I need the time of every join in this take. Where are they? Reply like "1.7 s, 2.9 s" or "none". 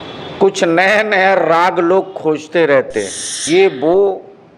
3.4 s